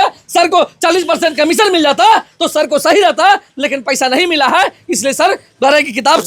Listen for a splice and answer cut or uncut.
uncut